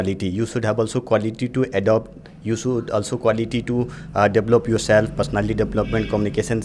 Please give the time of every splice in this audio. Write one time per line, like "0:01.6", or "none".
none